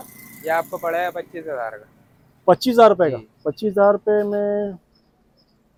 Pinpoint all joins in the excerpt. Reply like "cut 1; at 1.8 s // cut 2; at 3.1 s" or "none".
none